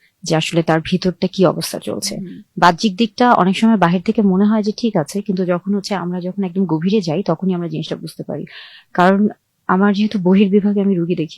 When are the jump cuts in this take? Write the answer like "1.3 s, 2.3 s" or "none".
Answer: none